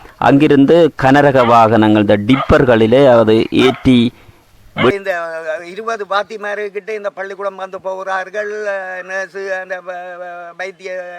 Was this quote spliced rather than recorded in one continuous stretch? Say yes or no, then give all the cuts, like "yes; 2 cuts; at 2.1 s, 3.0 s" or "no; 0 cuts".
yes; 1 cut; at 4.9 s